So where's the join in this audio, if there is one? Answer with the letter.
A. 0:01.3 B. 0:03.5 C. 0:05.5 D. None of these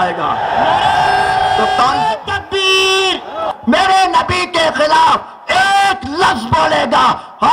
B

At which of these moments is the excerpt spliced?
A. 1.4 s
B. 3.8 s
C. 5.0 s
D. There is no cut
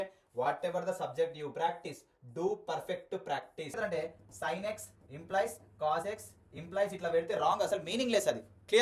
B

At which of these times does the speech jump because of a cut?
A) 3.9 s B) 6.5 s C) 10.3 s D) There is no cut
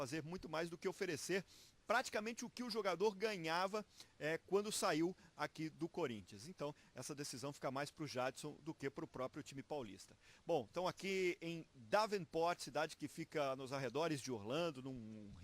B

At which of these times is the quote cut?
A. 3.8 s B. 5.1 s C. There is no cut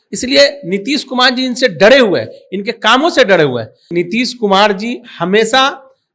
A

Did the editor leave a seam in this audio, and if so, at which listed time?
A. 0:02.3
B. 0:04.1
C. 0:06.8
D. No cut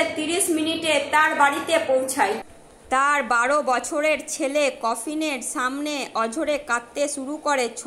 D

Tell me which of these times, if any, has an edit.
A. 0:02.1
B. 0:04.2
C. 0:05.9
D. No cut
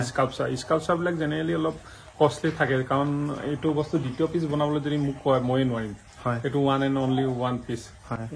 D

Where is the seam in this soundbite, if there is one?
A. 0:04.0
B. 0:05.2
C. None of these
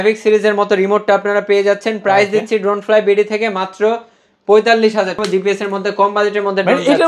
B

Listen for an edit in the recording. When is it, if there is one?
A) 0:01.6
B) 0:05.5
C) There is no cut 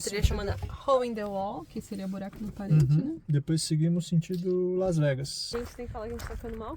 B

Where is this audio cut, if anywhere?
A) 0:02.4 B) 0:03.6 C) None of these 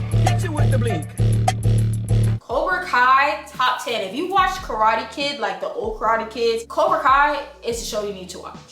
A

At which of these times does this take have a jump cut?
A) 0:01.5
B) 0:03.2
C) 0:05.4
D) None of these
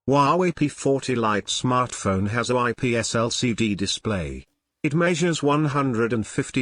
A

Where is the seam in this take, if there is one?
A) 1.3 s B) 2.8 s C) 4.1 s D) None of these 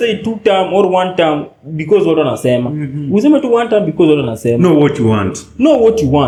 D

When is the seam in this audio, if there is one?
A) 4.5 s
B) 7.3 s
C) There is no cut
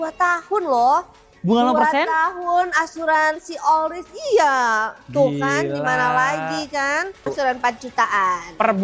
B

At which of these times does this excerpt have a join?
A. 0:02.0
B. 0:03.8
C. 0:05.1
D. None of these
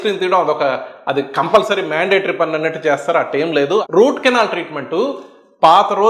B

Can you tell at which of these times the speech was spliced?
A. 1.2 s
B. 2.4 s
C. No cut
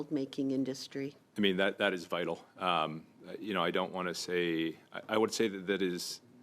A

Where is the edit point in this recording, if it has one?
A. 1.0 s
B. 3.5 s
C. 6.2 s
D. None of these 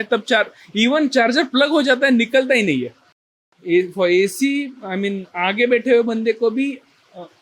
B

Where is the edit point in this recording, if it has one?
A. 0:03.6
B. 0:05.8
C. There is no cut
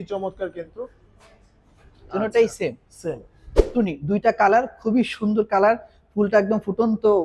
A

